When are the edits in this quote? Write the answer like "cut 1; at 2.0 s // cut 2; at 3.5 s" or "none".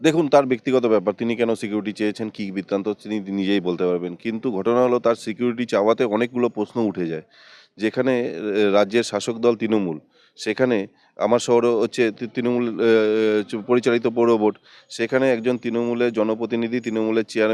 none